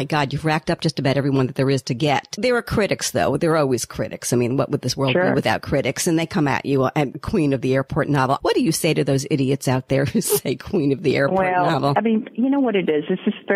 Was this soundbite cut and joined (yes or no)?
yes